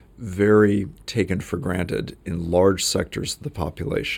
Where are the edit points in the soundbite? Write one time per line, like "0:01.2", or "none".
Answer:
none